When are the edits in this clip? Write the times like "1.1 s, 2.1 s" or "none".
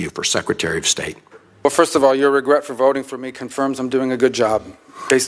1.6 s